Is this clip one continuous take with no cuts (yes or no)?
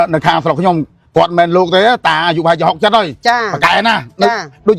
yes